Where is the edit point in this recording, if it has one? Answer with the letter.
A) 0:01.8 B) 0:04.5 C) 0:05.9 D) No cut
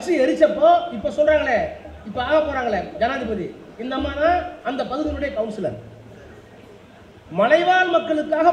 D